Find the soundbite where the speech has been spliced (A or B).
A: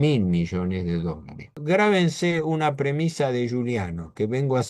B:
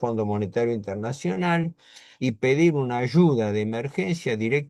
A